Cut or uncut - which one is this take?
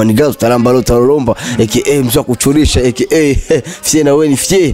uncut